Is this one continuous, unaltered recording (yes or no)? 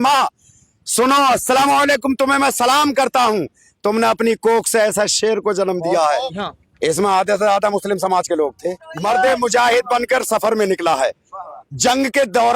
no